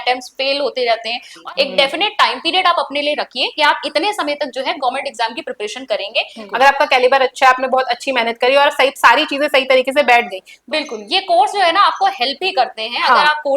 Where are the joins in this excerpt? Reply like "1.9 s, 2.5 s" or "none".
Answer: 1.3 s, 6.4 s, 10.6 s

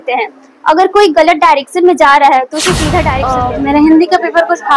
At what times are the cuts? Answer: 3.3 s

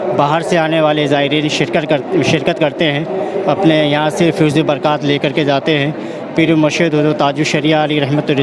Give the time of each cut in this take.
none

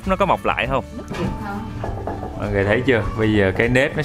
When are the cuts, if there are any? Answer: 1.1 s

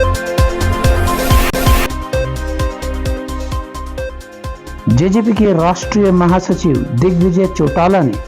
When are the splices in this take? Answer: 1.1 s

